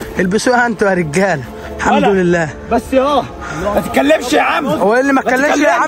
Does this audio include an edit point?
no; 0 cuts

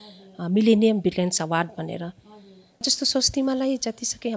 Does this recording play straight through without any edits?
no; 1 cut; at 2.8 s

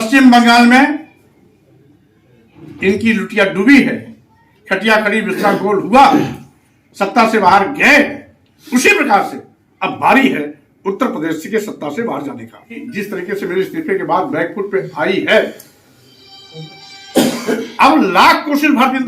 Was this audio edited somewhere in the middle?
yes; 1 cut; at 12.9 s

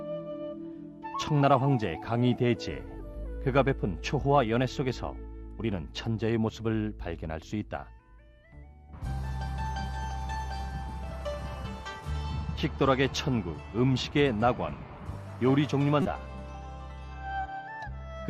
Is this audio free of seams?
yes; 0 cuts

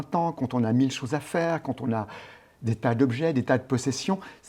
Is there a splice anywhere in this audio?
no; 0 cuts

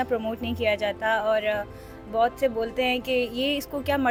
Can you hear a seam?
no; 0 cuts

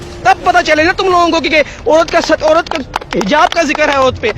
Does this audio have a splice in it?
no; 0 cuts

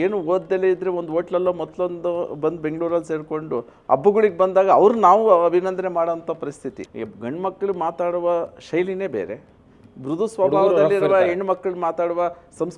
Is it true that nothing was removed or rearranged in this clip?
no; 1 cut; at 6.8 s

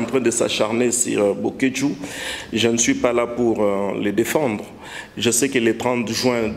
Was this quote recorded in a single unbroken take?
yes; 0 cuts

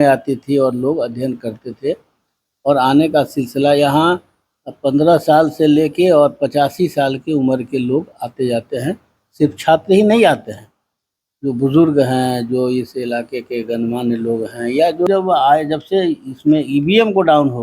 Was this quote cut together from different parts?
yes; 1 cut; at 15.1 s

